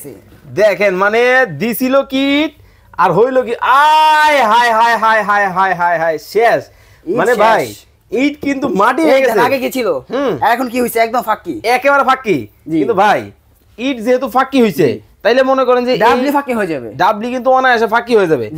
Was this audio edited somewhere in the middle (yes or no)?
no